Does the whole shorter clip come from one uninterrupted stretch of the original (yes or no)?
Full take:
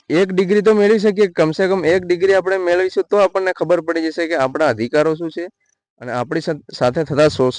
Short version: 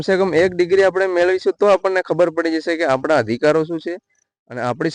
yes